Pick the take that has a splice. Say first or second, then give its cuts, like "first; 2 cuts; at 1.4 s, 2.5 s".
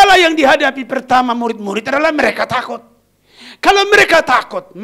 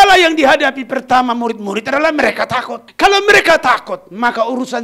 second; 1 cut; at 2.8 s